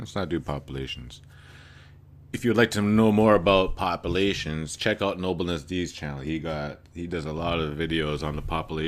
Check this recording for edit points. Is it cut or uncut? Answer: cut